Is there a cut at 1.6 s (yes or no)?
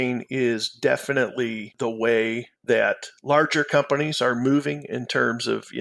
yes